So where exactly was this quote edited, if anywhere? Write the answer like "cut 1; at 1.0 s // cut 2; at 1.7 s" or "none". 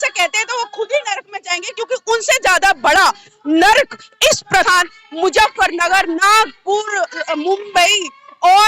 cut 1; at 4.7 s